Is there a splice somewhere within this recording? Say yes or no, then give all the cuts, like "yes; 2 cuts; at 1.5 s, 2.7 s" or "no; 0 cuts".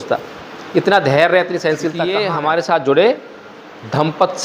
yes; 1 cut; at 2.2 s